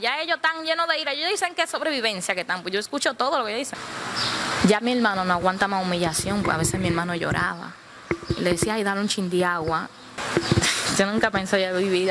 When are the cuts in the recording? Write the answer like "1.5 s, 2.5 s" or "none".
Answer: 3.9 s, 10.1 s